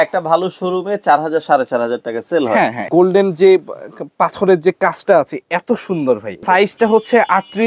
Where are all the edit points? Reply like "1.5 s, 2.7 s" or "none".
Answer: 2.9 s, 6.4 s

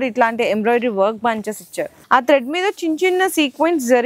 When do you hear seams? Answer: 1.9 s

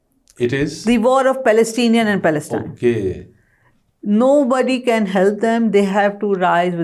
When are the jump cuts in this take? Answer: none

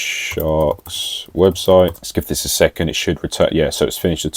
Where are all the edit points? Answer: 2.1 s

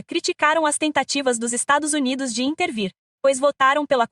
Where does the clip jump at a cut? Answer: none

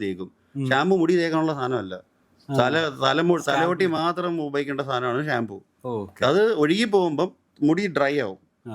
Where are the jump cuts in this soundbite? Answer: none

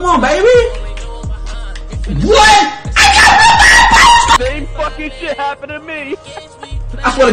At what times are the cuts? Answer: 4.4 s

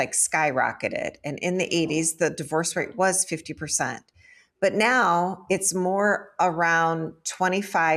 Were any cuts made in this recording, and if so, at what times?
none

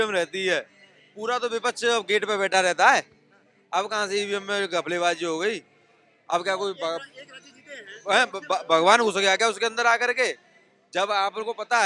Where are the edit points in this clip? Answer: none

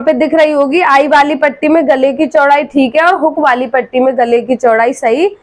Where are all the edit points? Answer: none

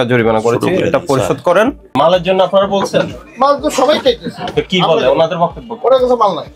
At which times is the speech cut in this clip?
1.9 s

